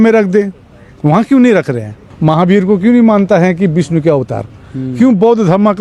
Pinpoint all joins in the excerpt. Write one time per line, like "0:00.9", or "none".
0:02.1

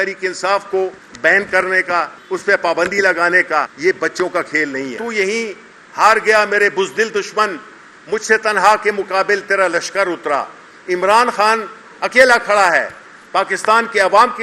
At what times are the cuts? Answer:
0:01.0
0:02.2
0:03.7
0:05.0

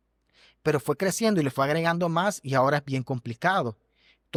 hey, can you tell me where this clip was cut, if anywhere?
none

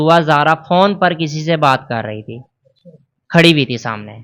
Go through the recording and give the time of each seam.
none

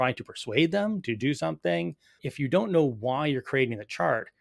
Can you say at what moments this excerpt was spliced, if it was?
0:02.2

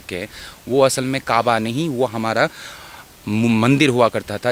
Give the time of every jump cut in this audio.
none

